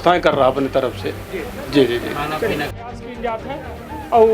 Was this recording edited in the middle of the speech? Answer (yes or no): yes